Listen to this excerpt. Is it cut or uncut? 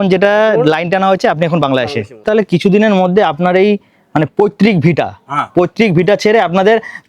cut